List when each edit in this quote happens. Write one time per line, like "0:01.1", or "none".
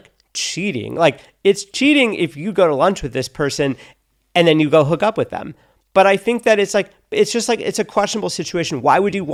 none